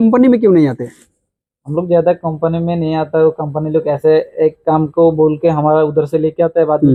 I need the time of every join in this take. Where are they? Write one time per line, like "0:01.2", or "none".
none